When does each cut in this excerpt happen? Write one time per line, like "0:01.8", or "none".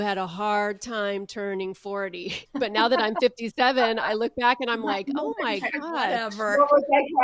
0:02.4